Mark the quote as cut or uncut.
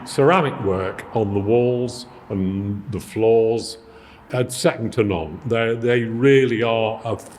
cut